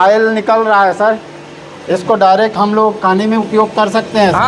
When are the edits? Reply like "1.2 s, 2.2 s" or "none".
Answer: none